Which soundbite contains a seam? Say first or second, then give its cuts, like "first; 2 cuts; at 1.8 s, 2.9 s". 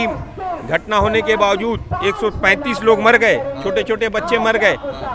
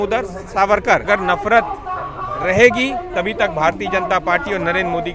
second; 1 cut; at 1.1 s